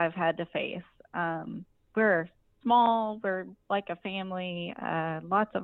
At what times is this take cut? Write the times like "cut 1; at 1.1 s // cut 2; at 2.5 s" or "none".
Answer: none